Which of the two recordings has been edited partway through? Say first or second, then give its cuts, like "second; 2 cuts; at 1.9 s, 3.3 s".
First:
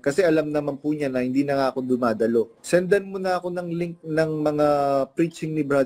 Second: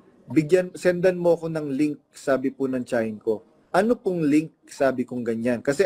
first; 1 cut; at 2.6 s